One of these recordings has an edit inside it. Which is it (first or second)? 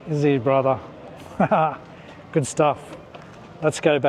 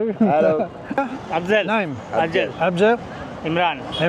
second